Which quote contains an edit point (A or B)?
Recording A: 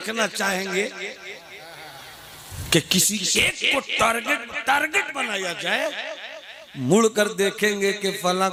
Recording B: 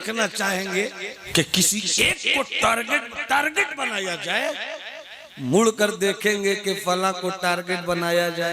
B